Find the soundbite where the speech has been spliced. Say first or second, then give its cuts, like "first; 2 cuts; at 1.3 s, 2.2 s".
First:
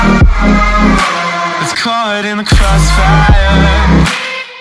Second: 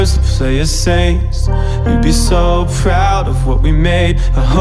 first; 1 cut; at 1.1 s